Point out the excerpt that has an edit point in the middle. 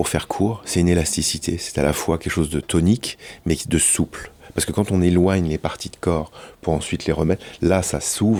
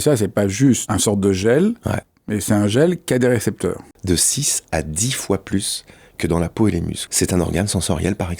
second; 3 cuts; at 0.8 s, 3.9 s, 7.0 s

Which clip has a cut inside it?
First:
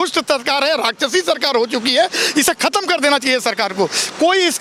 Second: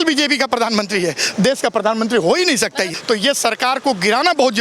second; 1 cut; at 3.0 s

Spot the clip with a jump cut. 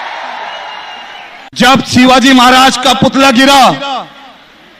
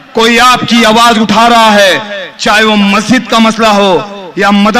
first; 1 cut; at 1.4 s

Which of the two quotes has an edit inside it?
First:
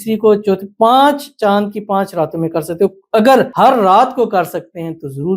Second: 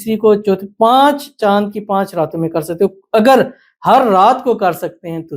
first; 1 cut; at 3.5 s

